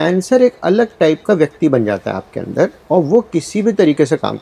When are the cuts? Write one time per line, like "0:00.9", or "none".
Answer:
0:02.8